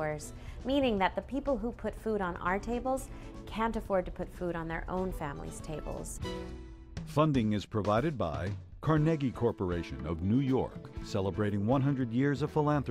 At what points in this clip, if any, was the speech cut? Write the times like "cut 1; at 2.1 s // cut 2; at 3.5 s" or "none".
cut 1; at 6.5 s